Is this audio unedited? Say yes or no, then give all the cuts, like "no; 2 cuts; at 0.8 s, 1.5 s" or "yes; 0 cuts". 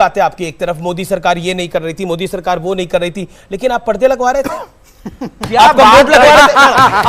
yes; 0 cuts